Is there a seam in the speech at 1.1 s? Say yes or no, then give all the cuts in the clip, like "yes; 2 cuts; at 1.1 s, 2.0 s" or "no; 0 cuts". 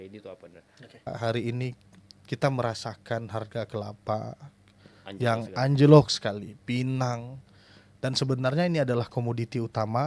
yes; 1 cut; at 1.1 s